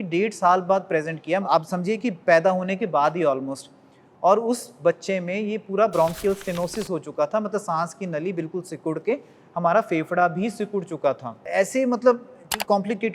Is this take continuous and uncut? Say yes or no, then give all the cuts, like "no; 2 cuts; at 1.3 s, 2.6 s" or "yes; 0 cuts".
no; 2 cuts; at 1.4 s, 11.4 s